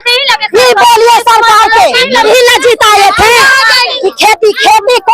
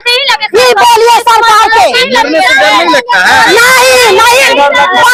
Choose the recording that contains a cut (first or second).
first